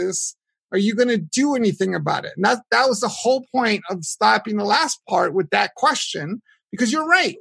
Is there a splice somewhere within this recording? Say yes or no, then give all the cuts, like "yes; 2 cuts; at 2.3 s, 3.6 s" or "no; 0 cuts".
no; 0 cuts